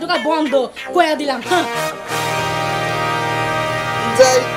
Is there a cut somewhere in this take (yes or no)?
no